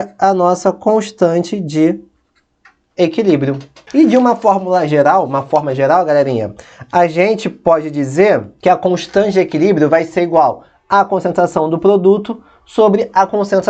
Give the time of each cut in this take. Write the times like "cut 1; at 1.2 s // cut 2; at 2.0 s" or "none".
cut 1; at 3.7 s // cut 2; at 8.5 s